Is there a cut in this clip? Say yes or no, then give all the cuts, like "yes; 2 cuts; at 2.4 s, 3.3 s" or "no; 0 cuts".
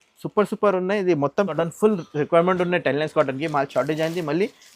yes; 1 cut; at 1.5 s